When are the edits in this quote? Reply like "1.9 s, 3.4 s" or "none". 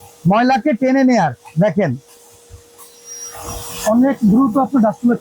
none